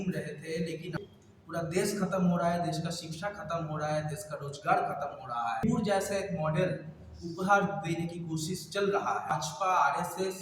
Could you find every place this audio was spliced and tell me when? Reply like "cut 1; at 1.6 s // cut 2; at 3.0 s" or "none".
cut 1; at 0.9 s // cut 2; at 5.6 s // cut 3; at 9.3 s